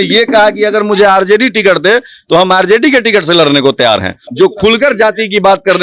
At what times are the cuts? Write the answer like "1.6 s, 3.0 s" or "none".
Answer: 4.2 s

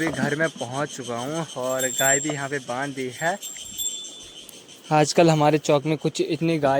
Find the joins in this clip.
none

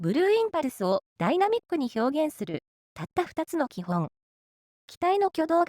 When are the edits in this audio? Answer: 1.1 s

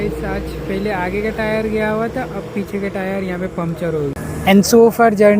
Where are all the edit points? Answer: 4.3 s

